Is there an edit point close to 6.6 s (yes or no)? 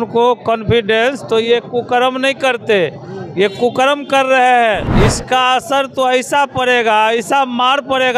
no